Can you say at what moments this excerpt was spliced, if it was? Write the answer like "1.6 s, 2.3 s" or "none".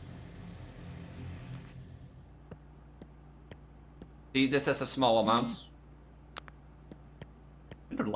2.0 s